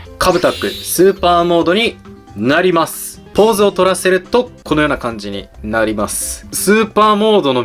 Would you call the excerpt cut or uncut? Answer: cut